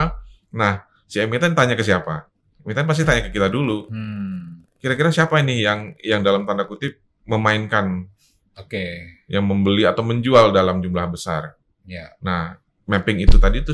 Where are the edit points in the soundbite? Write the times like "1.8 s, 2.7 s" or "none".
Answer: none